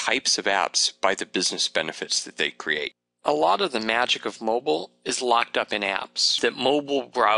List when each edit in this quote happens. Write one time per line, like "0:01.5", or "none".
0:03.1
0:06.4